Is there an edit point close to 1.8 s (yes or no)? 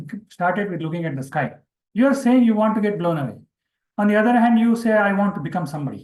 yes